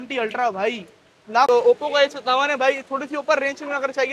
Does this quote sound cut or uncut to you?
cut